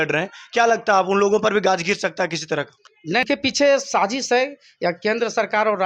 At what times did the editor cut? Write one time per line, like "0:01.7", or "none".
0:03.2

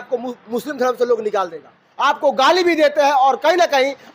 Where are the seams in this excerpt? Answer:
0:01.8

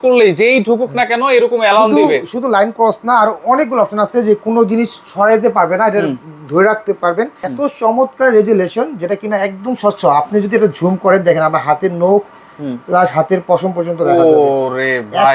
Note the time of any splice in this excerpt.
0:07.4

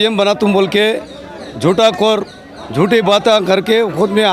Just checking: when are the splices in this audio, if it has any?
none

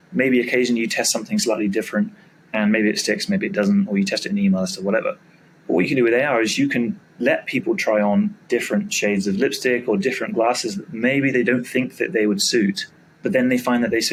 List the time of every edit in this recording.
none

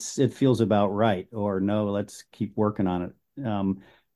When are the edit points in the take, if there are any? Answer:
none

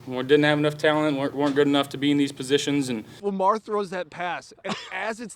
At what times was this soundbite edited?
0:03.1

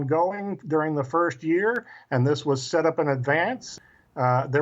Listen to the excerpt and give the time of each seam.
0:03.6

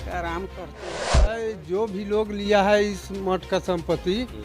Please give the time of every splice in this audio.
0:01.2

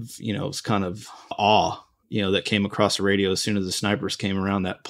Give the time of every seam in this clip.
0:01.3

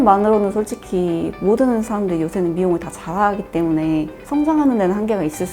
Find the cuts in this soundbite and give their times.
0:04.2

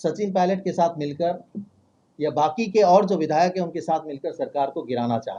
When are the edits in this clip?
none

